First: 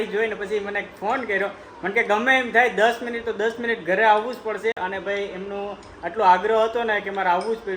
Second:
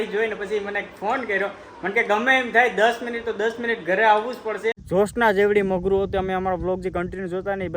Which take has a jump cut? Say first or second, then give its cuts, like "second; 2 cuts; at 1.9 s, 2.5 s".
second; 1 cut; at 4.8 s